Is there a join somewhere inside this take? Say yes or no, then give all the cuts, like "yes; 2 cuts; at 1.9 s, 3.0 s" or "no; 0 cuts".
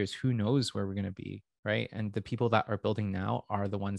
no; 0 cuts